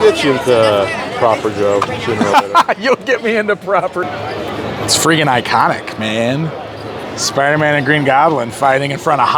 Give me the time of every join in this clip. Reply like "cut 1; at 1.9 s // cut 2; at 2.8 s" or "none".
cut 1; at 4.0 s